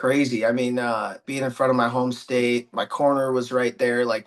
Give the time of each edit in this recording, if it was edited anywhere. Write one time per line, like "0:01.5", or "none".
0:01.3

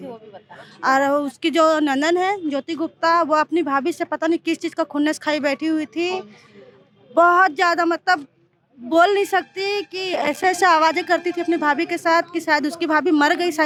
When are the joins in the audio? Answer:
none

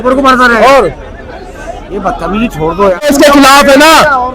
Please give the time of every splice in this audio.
0:03.0

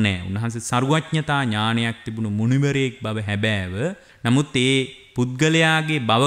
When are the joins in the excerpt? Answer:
0:04.1
0:05.0

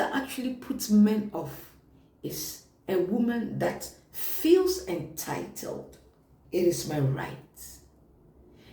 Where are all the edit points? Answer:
0:06.4

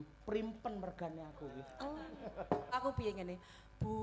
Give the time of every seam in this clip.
0:02.8

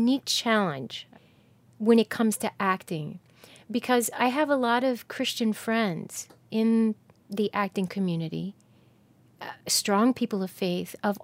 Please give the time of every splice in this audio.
0:01.0

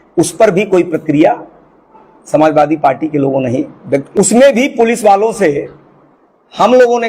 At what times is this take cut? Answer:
0:04.1

